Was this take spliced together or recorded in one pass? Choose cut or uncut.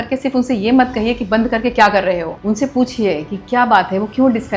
cut